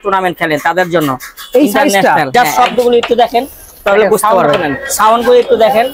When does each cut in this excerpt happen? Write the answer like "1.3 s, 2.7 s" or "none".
2.3 s